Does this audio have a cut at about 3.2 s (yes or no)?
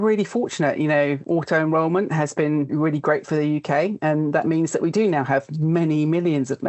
no